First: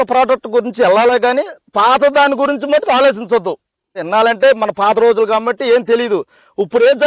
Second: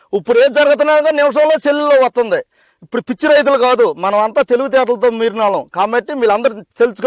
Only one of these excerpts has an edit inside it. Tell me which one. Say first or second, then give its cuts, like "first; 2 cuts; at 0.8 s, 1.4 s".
first; 1 cut; at 4.0 s